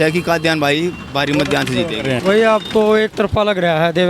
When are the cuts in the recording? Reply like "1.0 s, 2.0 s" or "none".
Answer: 2.2 s